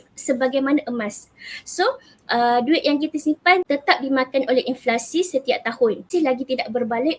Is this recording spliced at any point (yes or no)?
yes